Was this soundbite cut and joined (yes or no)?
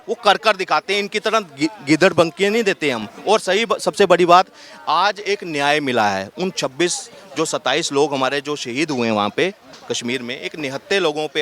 no